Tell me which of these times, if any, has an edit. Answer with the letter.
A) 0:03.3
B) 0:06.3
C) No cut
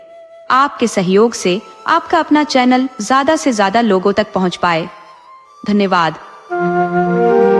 B